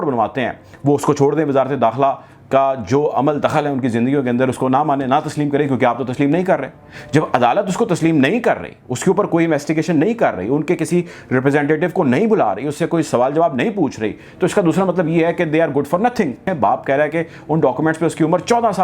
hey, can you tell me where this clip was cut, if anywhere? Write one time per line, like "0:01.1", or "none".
0:16.5